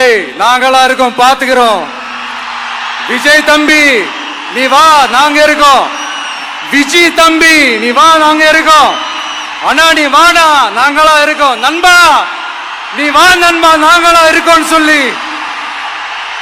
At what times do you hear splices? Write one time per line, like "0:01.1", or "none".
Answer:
none